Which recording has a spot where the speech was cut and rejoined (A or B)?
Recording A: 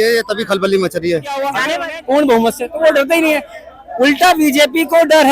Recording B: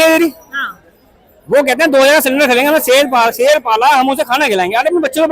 A